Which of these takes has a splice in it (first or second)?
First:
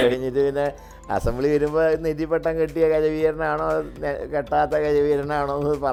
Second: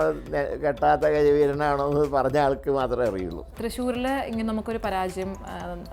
second